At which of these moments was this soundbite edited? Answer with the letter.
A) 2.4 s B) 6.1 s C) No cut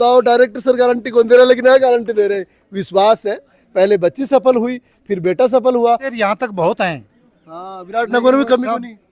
B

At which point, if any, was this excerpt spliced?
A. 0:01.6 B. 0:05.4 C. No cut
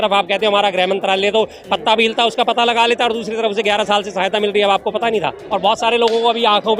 B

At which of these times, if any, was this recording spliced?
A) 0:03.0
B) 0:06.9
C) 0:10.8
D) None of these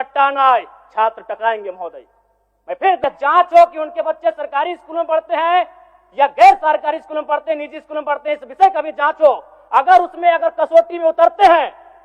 A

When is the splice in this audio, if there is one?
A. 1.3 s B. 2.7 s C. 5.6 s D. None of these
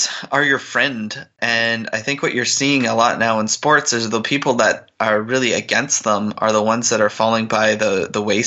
A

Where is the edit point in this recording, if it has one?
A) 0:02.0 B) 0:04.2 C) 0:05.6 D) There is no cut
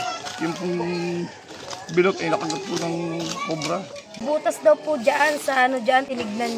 B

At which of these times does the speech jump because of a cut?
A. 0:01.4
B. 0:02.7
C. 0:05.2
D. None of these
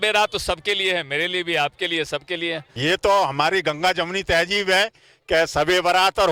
B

